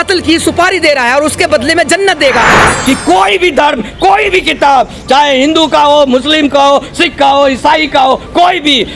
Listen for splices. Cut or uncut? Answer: cut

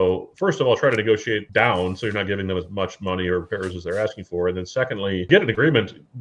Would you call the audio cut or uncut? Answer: cut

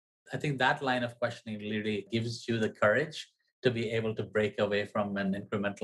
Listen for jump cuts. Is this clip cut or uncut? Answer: uncut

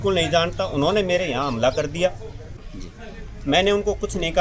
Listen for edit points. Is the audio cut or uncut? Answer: cut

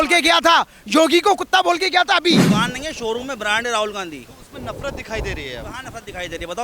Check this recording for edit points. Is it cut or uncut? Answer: cut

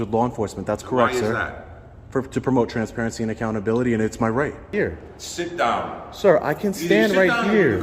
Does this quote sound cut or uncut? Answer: cut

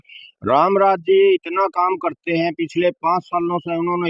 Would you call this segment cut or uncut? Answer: uncut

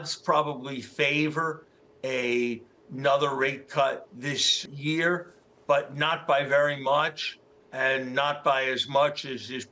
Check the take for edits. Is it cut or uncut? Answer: uncut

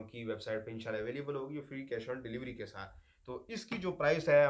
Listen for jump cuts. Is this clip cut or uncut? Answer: uncut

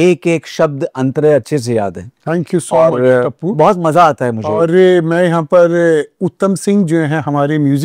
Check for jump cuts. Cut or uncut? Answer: uncut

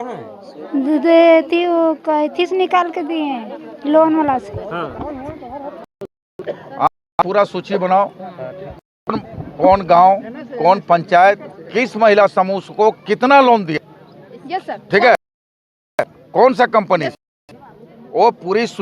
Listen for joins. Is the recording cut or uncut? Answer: cut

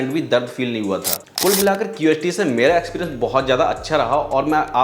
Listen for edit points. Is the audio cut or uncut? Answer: cut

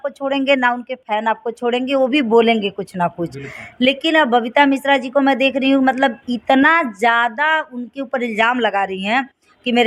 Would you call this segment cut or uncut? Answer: uncut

